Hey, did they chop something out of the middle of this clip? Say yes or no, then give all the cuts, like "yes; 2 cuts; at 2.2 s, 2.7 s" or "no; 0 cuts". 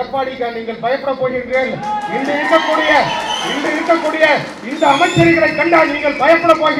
no; 0 cuts